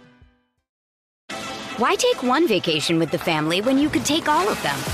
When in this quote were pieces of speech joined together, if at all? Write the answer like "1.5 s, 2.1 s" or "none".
1.1 s